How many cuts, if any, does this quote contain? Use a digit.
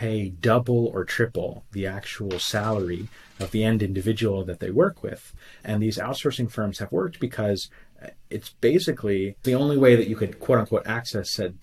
2